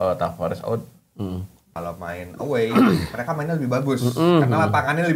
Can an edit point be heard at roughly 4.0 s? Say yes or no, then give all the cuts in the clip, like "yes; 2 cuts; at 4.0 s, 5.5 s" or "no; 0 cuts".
no; 1 cut; at 1.6 s